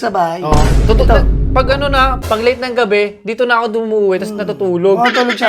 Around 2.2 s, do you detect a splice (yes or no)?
yes